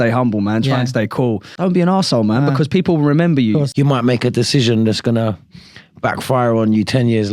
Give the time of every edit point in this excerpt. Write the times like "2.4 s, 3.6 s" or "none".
1.5 s, 3.7 s